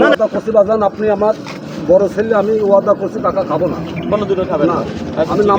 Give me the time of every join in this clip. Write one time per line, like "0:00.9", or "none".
none